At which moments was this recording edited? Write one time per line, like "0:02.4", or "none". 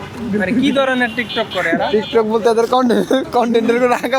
none